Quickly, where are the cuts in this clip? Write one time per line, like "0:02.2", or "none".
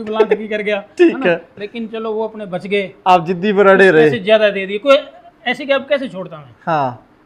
none